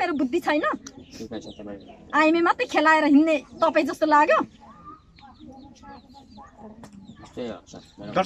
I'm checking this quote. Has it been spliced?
no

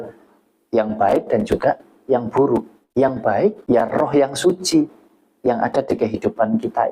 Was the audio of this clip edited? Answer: yes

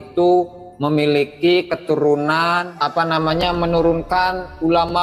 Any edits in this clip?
yes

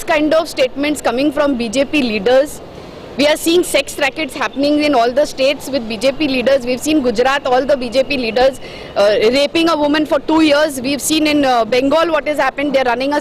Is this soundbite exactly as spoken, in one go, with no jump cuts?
yes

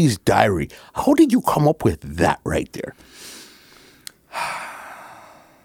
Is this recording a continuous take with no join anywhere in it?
yes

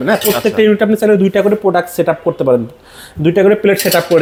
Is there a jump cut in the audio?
no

